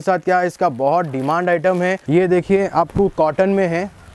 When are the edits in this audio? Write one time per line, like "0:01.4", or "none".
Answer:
0:02.0